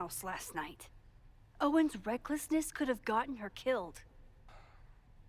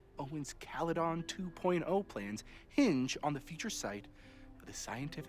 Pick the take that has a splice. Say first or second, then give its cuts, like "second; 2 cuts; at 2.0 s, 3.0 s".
first; 1 cut; at 4.4 s